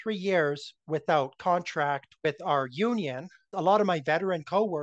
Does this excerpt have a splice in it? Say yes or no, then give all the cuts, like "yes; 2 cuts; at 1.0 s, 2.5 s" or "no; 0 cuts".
yes; 1 cut; at 3.4 s